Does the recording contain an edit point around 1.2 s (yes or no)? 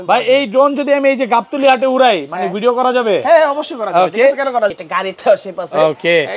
no